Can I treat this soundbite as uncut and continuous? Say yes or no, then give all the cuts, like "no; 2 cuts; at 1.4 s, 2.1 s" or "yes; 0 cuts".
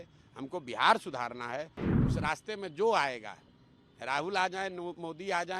no; 1 cut; at 1.8 s